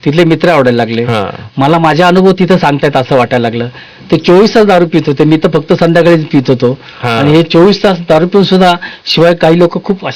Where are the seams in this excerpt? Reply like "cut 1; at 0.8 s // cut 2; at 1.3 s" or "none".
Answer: none